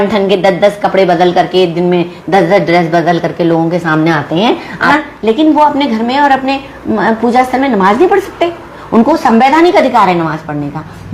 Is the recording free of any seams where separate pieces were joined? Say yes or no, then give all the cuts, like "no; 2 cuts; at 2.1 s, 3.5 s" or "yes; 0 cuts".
no; 1 cut; at 4.9 s